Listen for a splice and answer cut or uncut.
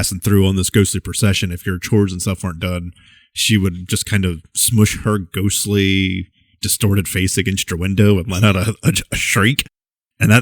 uncut